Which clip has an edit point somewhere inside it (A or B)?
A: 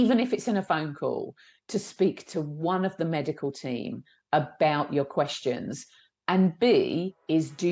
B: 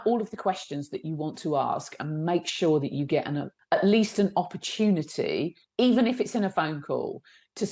B